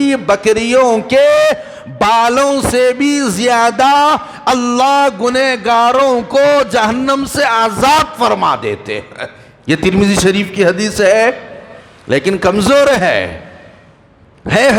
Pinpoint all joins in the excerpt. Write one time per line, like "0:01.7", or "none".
none